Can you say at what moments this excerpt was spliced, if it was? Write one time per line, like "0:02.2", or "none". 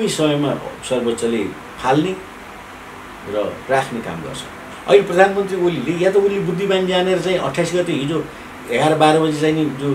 0:04.6